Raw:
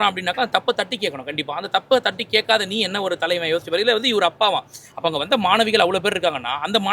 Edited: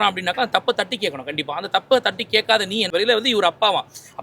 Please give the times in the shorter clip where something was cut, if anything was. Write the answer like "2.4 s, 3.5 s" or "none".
2.9 s